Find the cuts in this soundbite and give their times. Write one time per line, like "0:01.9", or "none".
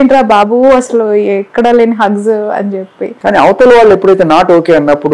0:03.1